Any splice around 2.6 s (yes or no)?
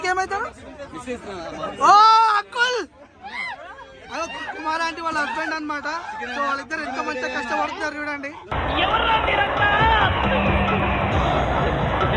no